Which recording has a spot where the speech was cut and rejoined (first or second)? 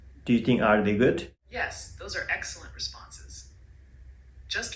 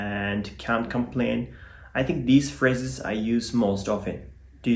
first